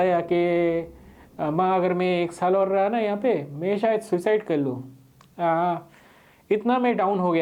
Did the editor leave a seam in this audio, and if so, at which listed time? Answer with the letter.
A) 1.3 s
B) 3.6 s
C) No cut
C